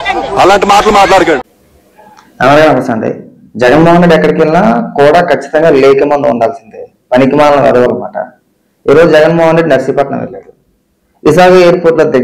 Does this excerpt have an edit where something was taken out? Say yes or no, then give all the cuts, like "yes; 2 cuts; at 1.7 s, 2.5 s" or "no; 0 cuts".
yes; 1 cut; at 1.2 s